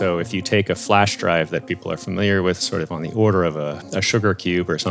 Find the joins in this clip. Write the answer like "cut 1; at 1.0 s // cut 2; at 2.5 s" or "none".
cut 1; at 2.6 s // cut 2; at 3.8 s